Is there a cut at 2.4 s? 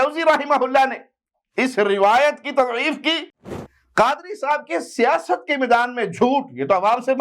no; 1 cut; at 3.7 s

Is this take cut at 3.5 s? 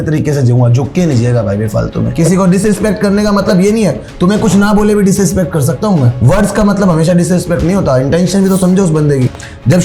no; 2 cuts; at 2.1 s, 6.1 s

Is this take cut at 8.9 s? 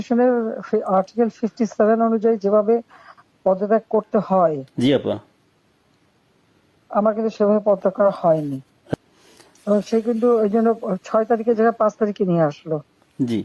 yes; 1 cut; at 8.9 s

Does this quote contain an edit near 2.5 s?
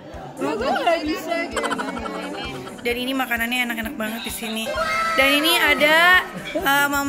yes; 1 cut; at 2.5 s

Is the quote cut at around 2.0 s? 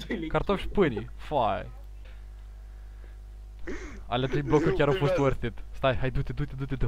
yes; 1 cut; at 2.0 s

